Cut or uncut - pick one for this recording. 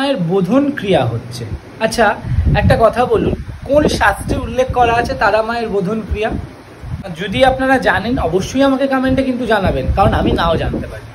uncut